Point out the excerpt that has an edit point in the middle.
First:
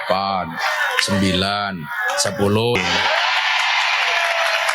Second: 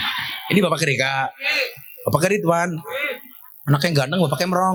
first; 1 cut; at 2.8 s

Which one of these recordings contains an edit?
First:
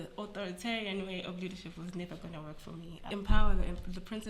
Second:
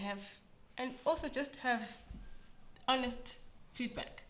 first; 1 cut; at 3.1 s

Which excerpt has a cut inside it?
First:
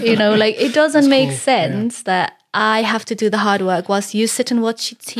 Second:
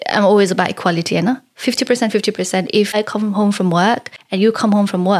second; 2 cuts; at 2.9 s, 4.2 s

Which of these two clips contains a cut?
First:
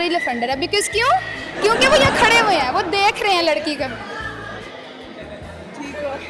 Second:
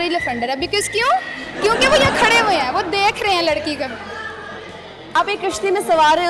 second; 1 cut; at 5.2 s

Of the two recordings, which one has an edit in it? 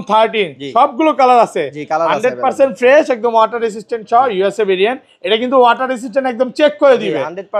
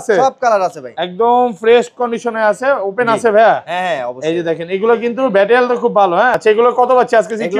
second; 1 cut; at 6.4 s

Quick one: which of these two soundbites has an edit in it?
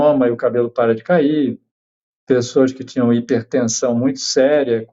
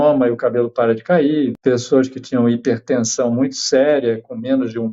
second; 1 cut; at 1.6 s

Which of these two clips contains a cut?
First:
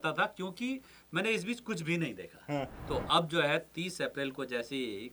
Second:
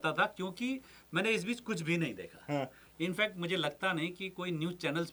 first; 1 cut; at 2.8 s

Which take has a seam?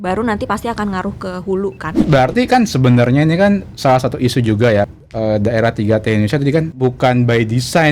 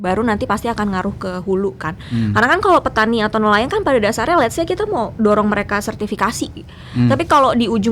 first; 3 cuts; at 1.9 s, 4.9 s, 6.7 s

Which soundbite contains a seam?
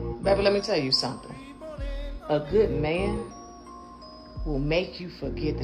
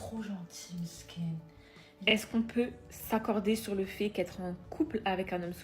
second; 1 cut; at 2.0 s

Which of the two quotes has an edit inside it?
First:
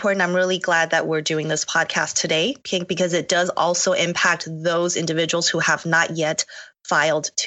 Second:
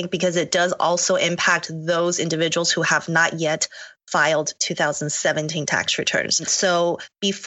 second; 1 cut; at 6.4 s

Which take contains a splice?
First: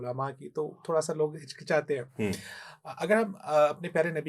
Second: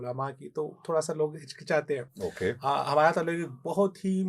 second; 1 cut; at 2.1 s

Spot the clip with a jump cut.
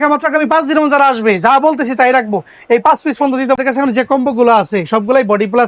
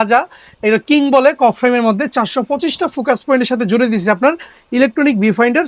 first; 1 cut; at 3.6 s

